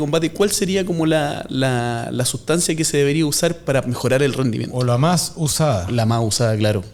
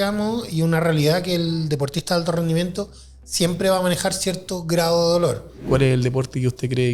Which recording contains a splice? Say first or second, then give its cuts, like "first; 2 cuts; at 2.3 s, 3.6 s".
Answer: second; 1 cut; at 5.5 s